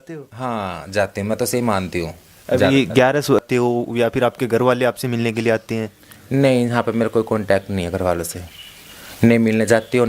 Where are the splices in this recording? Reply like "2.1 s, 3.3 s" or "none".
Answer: 3.4 s